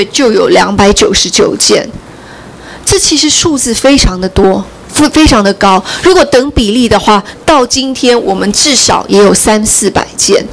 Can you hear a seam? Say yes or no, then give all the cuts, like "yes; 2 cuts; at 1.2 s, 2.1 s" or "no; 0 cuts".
no; 0 cuts